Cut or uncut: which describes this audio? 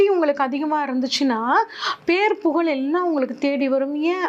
uncut